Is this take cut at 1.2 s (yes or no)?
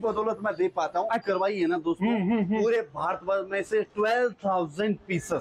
yes